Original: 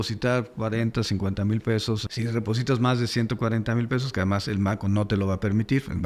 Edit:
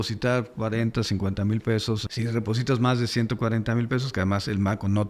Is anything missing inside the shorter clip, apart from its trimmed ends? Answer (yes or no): no